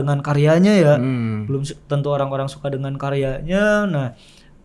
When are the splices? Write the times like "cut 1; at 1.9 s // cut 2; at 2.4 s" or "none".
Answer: none